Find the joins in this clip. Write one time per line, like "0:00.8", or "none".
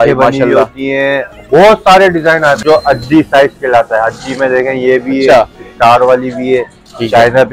0:02.6